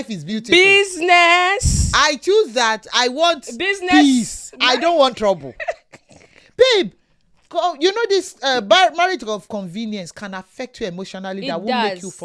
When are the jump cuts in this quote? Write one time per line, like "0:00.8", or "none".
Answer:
none